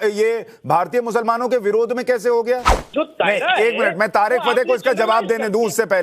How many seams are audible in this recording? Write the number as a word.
one